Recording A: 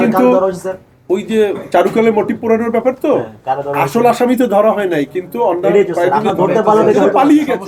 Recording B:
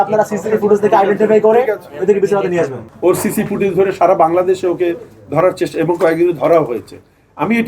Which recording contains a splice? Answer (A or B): B